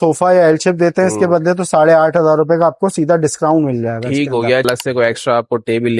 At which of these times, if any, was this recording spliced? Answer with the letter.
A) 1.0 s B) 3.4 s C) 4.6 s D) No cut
C